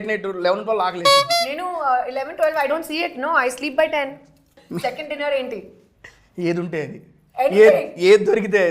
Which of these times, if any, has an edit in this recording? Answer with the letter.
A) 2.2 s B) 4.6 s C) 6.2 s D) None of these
B